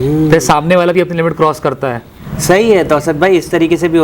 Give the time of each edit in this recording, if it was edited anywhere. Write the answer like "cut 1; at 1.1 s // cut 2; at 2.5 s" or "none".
none